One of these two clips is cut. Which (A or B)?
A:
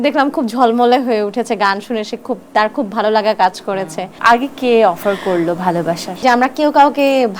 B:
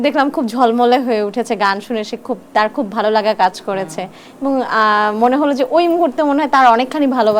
A